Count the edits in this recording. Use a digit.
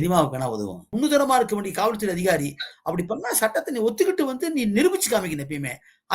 1